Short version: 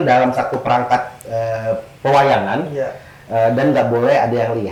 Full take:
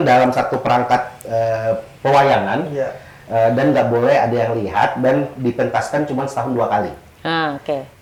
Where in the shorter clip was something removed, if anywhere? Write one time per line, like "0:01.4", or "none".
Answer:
none